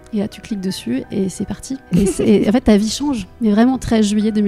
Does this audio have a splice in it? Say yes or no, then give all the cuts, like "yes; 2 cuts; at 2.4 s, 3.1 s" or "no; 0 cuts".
yes; 1 cut; at 1.7 s